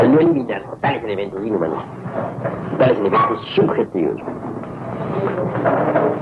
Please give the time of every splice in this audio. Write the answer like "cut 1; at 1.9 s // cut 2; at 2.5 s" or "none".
none